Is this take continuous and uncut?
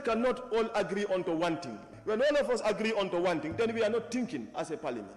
no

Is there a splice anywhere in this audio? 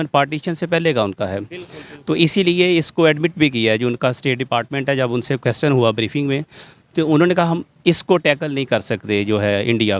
no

